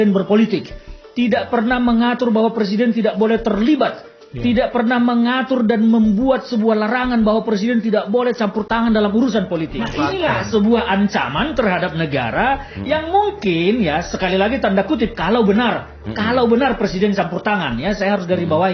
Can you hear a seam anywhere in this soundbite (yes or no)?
yes